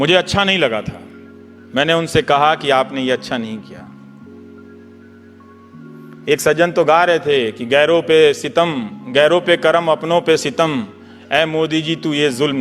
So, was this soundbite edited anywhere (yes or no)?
yes